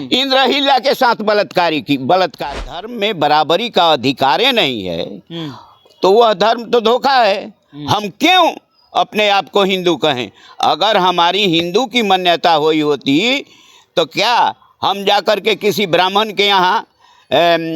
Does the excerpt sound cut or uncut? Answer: cut